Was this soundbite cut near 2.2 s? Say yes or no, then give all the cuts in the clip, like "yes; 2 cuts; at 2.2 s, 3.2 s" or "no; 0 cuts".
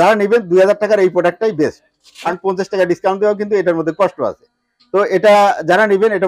yes; 1 cut; at 2.2 s